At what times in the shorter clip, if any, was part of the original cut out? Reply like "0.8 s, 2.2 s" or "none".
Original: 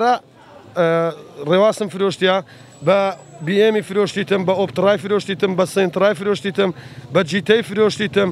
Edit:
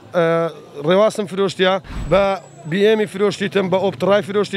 1.9 s